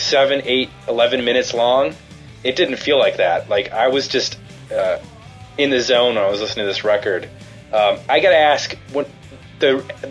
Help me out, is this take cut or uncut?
uncut